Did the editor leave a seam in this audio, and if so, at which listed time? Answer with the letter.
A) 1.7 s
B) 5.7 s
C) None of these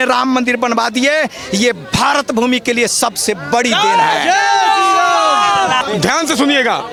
C